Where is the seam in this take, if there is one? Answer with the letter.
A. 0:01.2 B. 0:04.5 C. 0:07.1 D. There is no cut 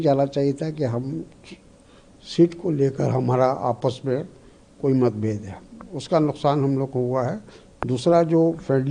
D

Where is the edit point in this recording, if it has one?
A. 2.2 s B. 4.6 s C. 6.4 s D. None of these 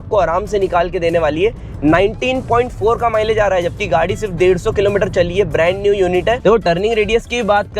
C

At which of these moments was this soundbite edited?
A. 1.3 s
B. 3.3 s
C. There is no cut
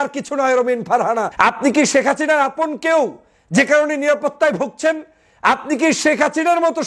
A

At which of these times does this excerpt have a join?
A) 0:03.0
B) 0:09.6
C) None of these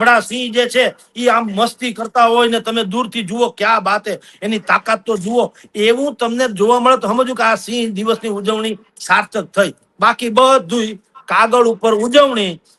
C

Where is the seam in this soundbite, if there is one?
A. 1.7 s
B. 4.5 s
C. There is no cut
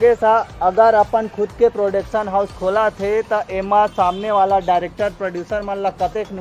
C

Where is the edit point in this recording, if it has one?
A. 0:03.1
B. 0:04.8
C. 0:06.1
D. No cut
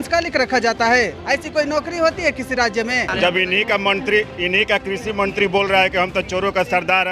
A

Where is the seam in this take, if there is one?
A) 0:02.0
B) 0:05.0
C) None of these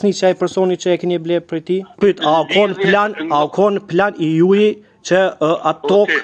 A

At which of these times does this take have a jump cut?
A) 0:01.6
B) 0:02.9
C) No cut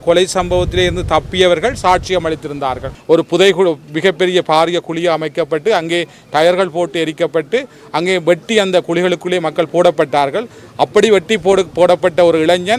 B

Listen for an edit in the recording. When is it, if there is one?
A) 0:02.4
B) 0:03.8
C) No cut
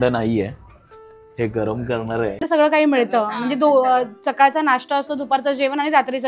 A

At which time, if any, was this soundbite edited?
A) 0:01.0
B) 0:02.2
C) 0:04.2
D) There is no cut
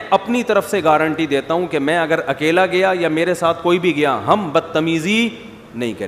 D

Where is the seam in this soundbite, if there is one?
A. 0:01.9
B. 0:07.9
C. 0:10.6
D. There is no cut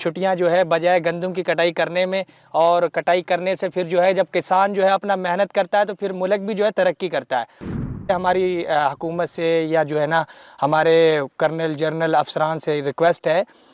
B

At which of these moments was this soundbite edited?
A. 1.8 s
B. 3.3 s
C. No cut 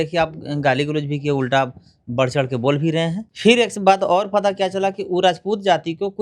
B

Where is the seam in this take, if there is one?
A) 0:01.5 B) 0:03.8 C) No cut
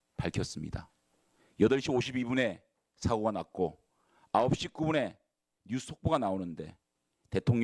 C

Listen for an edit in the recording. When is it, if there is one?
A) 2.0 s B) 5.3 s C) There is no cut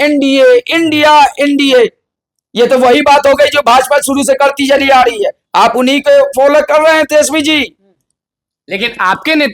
C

